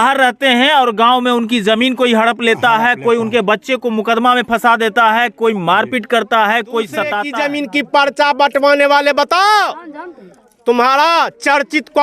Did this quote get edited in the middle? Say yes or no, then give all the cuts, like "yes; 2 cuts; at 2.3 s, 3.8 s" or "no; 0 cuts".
yes; 1 cut; at 7.2 s